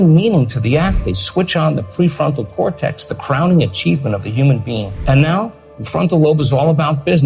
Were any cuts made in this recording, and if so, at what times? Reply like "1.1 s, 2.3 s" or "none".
4.9 s